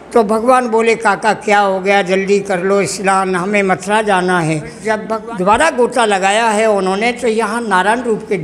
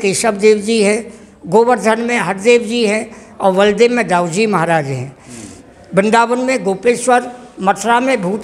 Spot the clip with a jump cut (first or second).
first